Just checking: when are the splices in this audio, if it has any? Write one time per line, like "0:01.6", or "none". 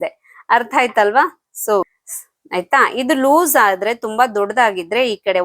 0:01.9